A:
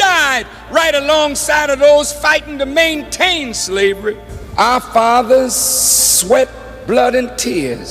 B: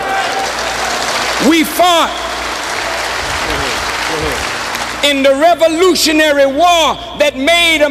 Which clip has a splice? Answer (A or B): A